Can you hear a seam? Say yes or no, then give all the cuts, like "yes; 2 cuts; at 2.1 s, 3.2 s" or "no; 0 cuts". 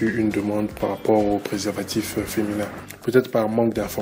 yes; 1 cut; at 2.8 s